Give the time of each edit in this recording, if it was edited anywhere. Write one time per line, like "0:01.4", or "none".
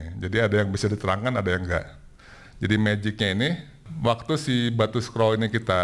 0:03.8